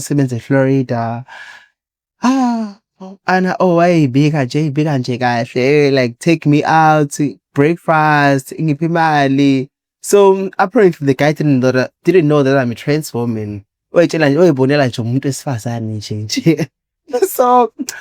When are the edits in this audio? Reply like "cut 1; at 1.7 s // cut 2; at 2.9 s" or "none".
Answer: none